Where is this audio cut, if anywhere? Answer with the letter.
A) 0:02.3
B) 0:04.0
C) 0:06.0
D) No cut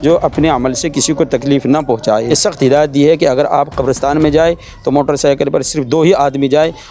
A